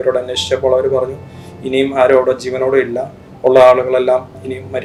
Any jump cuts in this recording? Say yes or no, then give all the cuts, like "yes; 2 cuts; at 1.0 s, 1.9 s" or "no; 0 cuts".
no; 0 cuts